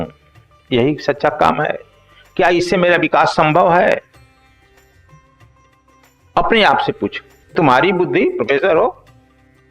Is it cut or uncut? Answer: cut